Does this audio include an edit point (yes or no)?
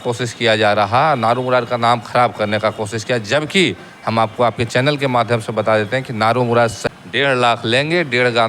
yes